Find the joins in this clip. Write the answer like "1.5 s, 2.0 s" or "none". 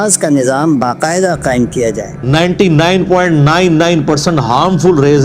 2.1 s

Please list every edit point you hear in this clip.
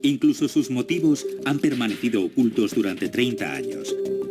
2.0 s

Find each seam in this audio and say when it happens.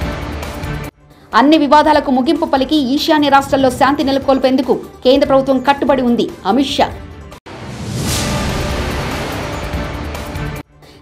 none

